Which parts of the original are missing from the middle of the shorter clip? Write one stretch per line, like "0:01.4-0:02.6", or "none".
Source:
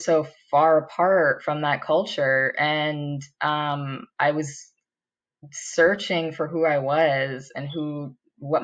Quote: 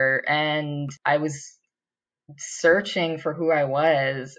0:03.2-0:04.1